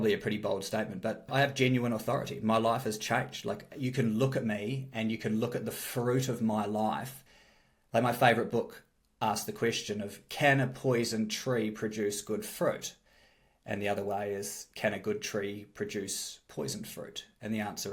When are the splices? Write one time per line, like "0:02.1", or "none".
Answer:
0:01.3